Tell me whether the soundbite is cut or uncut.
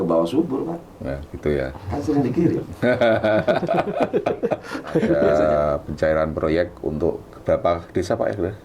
cut